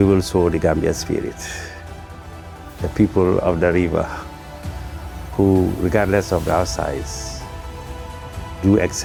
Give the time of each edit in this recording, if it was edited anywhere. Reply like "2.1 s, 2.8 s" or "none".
none